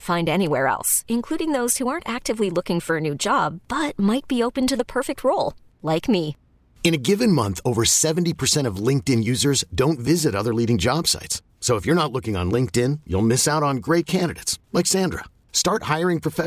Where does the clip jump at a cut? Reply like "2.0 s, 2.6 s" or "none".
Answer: none